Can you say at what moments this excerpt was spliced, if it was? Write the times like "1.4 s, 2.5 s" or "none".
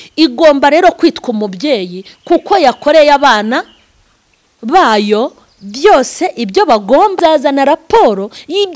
7.2 s